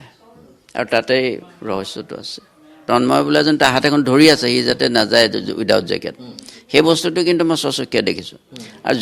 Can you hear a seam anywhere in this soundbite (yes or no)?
yes